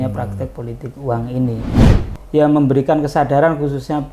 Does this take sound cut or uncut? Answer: cut